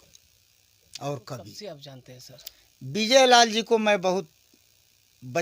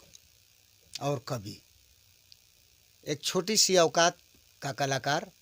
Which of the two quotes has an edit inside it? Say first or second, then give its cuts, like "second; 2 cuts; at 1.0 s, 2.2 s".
first; 1 cut; at 1.6 s